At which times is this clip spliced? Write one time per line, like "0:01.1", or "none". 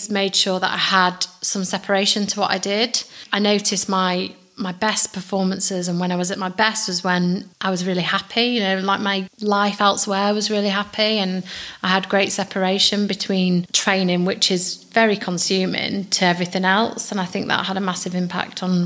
0:03.2
0:07.5
0:09.3
0:13.7